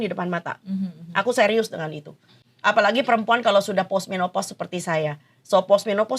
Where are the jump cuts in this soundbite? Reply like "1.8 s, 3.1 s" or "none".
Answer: none